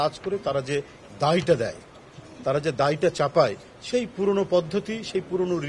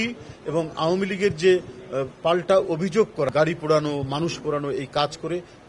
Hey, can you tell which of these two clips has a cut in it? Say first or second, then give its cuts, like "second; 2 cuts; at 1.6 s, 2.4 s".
second; 1 cut; at 3.3 s